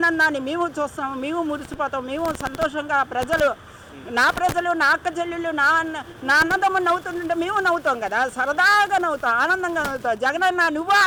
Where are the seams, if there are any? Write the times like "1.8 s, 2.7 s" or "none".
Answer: none